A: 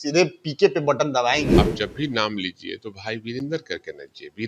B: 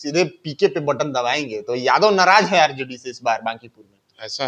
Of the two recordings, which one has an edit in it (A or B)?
A